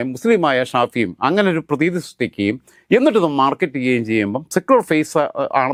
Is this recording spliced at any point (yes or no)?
no